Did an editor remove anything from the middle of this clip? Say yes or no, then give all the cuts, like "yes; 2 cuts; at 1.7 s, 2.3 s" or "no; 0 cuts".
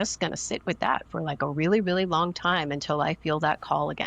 no; 0 cuts